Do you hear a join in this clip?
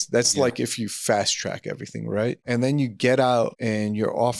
yes; 2 cuts; at 2.4 s, 3.6 s

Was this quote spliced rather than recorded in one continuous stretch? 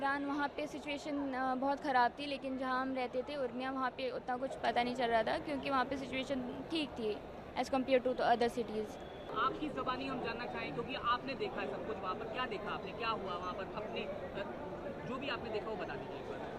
no; 0 cuts

